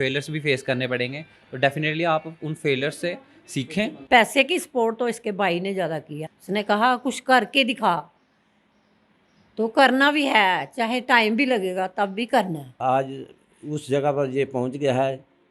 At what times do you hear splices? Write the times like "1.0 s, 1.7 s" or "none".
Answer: 4.0 s, 6.2 s, 12.8 s